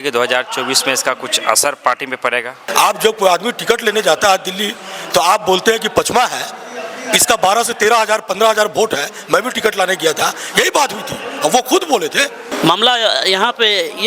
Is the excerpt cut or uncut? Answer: cut